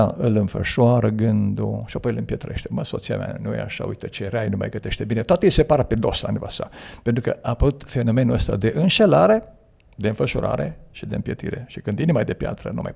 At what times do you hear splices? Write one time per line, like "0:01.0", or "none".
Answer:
none